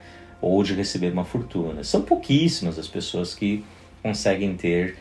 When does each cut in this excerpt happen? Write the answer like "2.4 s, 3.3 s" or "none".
none